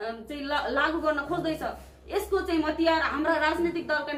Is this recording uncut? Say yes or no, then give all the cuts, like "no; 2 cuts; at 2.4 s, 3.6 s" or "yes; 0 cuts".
yes; 0 cuts